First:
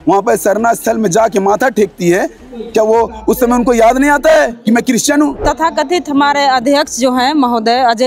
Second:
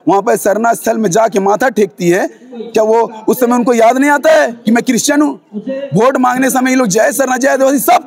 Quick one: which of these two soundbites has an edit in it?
first; 1 cut; at 5.4 s

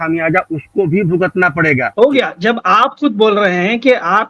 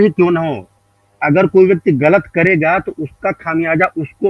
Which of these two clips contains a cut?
first; 1 cut; at 1.9 s

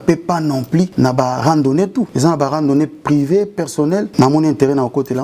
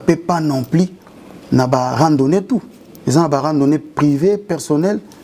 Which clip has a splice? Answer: first; 3 cuts; at 0.9 s, 2.1 s, 4.1 s

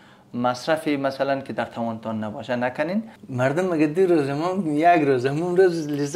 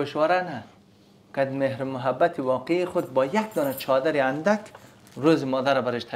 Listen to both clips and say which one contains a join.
first; 1 cut; at 3.2 s

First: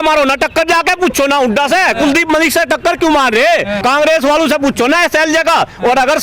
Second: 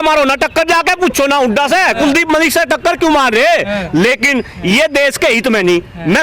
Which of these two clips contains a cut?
first; 1 cut; at 3.7 s

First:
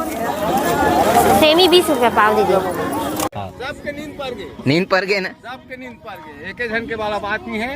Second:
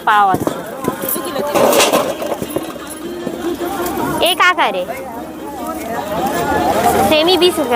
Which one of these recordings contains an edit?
first; 1 cut; at 3.3 s

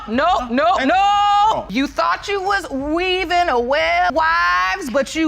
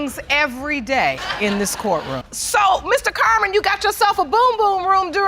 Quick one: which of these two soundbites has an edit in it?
first; 1 cut; at 4.1 s

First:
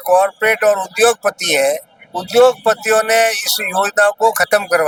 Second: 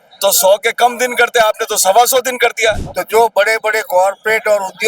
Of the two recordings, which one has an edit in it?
second; 1 cut; at 2.9 s

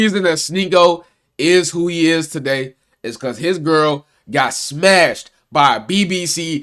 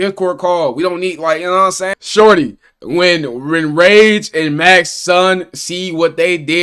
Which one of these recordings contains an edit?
second; 1 cut; at 1.9 s

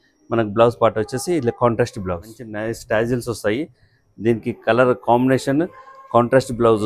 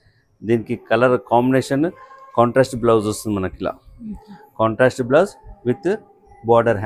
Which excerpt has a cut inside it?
first; 1 cut; at 2.5 s

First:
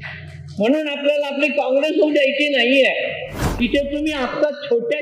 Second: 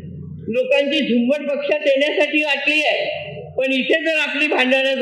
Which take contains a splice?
first; 1 cut; at 3.5 s

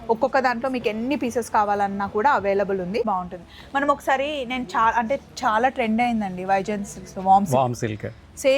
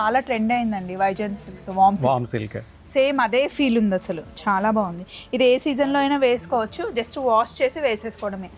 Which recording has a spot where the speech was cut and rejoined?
first; 1 cut; at 3.0 s

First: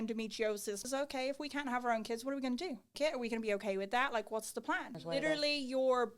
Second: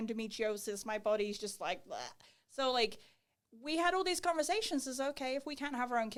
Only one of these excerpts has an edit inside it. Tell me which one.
first; 3 cuts; at 0.8 s, 2.9 s, 4.9 s

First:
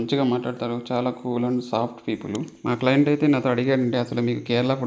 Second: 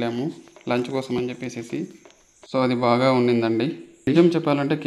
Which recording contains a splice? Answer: second; 1 cut; at 4.0 s

